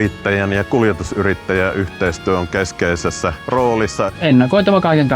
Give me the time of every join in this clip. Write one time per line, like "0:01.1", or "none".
0:03.4
0:04.1

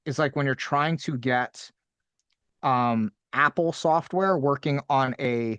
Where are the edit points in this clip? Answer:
none

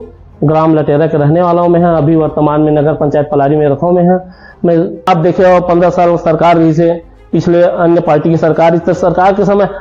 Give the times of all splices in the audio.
0:05.1

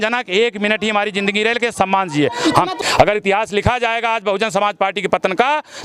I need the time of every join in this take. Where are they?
0:02.8

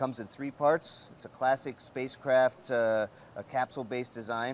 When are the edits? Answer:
0:01.7

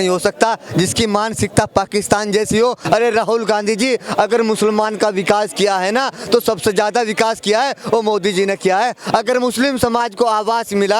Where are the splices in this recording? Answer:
0:02.8

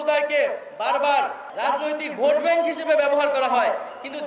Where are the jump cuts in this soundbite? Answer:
0:01.4

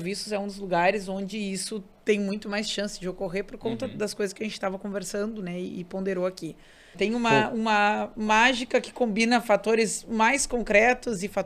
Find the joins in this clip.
0:06.9

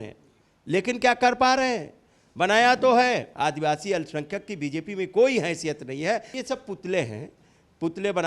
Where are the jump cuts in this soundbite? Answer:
0:03.3
0:06.3

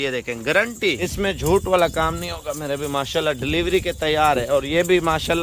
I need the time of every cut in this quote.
0:01.1

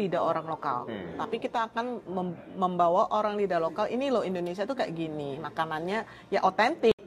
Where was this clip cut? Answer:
none

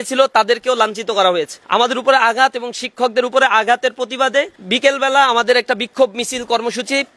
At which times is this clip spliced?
0:01.6
0:04.6

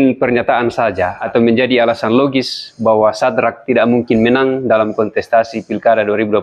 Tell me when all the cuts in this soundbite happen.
0:01.2

